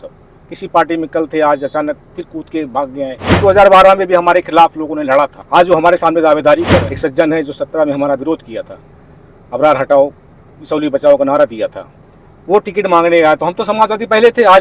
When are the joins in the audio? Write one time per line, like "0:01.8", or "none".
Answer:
0:03.4
0:05.4
0:06.9